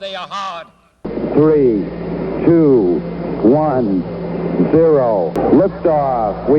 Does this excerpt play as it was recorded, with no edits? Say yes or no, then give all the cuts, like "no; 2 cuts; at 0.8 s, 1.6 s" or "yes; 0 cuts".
no; 1 cut; at 5.3 s